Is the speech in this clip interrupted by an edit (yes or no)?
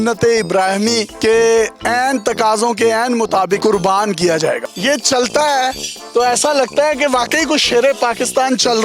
yes